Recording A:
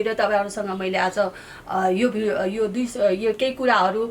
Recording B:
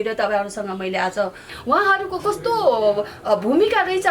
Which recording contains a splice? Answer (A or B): B